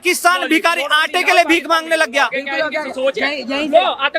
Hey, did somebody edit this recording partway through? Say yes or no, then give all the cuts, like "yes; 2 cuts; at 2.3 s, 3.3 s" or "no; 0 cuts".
no; 0 cuts